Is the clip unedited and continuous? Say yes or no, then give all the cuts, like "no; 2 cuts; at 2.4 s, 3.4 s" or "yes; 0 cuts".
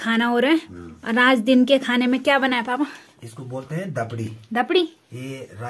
yes; 0 cuts